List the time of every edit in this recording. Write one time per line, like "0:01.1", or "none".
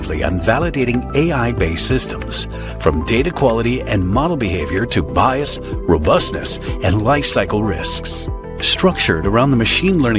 none